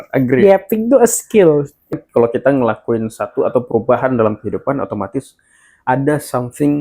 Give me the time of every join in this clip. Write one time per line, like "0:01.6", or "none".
0:01.9